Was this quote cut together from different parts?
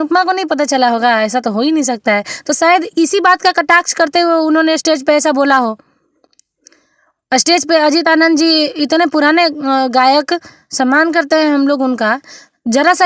no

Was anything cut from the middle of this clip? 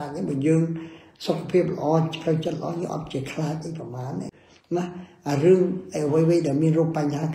yes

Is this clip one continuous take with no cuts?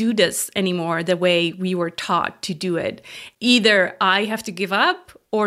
no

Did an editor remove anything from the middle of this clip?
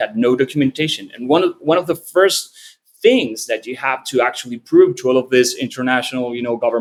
no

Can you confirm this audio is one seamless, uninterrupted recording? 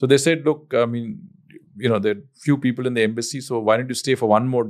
yes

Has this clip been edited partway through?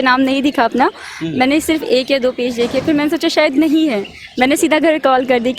no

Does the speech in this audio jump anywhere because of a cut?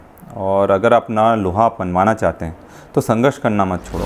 no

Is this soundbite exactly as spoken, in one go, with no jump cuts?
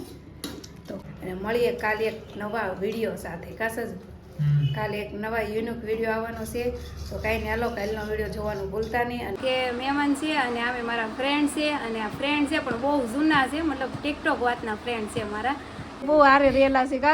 no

